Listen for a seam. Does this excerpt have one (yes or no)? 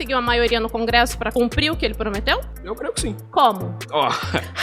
yes